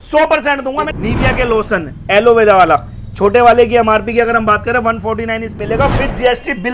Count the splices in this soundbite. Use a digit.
2